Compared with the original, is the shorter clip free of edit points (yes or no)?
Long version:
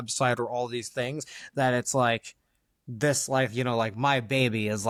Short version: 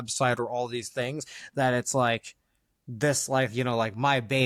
yes